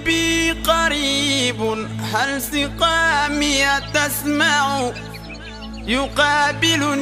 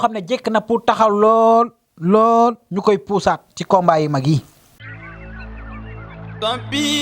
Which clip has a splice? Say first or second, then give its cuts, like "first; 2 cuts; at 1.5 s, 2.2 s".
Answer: second; 1 cut; at 4.9 s